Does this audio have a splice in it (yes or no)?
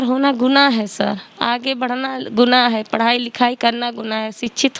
no